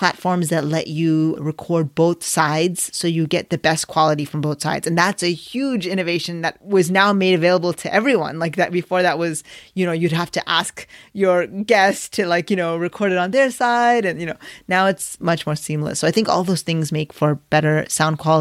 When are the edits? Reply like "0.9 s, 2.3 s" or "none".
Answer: 6.6 s, 15.1 s